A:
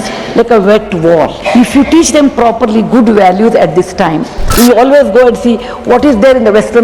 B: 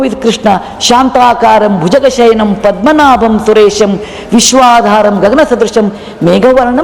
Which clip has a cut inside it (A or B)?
A